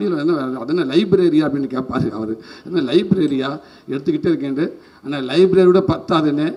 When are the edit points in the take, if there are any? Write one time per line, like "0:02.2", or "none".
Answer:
none